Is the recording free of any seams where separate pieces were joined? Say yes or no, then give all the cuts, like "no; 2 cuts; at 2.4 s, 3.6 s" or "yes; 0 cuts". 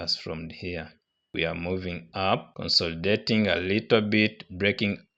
no; 1 cut; at 1.3 s